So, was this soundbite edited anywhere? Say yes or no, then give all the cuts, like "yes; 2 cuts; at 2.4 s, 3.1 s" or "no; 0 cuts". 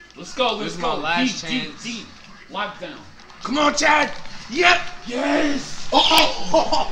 no; 0 cuts